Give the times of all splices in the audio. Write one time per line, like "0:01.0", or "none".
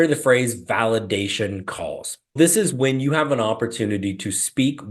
0:02.3